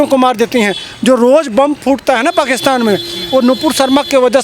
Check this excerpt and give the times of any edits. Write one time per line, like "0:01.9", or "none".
none